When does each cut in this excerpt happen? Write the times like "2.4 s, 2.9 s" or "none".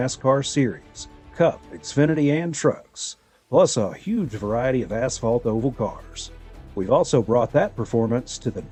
none